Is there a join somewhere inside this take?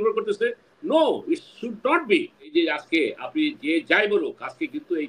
yes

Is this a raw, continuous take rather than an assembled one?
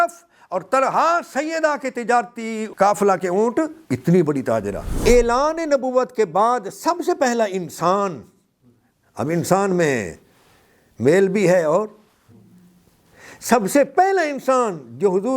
no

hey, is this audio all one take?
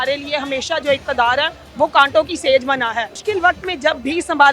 no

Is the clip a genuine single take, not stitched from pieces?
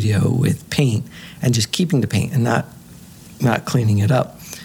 yes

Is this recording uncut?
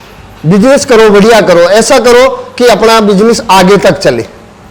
yes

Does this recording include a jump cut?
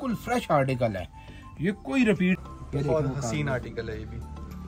yes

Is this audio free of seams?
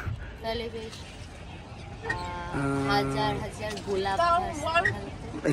yes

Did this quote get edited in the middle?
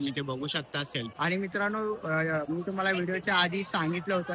yes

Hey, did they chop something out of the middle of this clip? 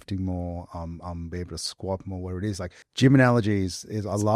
yes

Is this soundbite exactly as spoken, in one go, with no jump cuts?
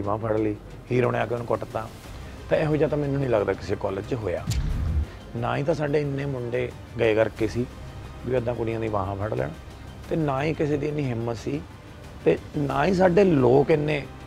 yes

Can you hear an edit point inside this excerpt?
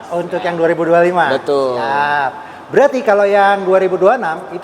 no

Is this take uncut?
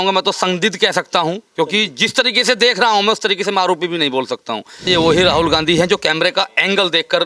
no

